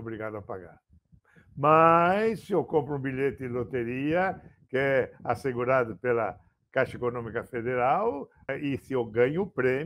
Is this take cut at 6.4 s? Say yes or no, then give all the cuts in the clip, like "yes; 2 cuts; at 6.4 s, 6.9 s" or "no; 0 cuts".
no; 1 cut; at 8.4 s